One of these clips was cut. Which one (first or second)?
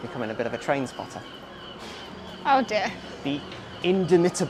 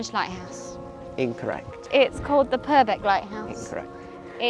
second